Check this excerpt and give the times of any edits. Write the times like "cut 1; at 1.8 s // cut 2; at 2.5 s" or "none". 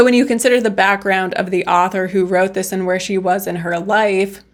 none